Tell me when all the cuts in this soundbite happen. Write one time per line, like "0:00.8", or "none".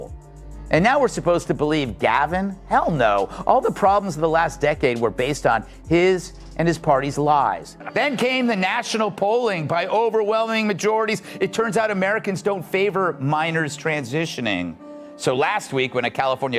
0:07.7